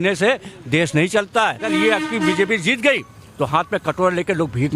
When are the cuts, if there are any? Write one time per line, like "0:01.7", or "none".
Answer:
0:01.6